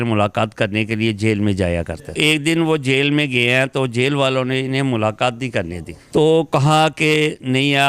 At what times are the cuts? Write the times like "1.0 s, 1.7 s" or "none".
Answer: 2.1 s